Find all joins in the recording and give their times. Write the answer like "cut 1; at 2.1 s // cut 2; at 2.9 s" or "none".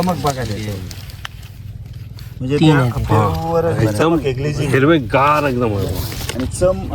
none